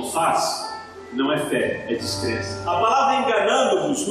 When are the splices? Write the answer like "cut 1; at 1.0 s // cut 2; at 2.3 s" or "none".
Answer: cut 1; at 2.5 s